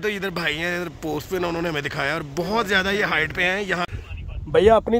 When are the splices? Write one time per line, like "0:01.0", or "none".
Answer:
0:04.0